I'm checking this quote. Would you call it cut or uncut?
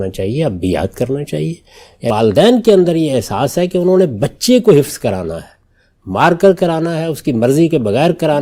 cut